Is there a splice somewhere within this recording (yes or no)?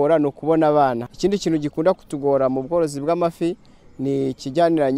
yes